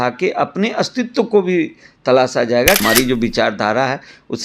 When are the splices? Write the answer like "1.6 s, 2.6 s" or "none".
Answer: 2.8 s